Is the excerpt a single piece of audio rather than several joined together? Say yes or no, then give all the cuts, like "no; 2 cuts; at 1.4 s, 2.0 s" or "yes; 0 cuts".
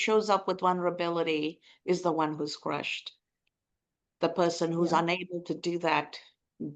yes; 0 cuts